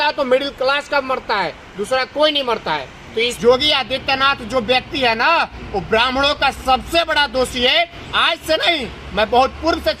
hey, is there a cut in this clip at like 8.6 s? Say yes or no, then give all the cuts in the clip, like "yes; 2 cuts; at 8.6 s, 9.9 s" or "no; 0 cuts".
no; 1 cut; at 3.3 s